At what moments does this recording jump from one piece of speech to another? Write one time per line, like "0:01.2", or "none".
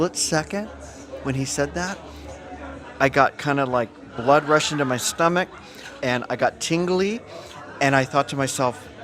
none